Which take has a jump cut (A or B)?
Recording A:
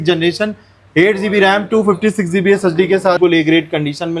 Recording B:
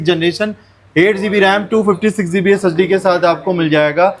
A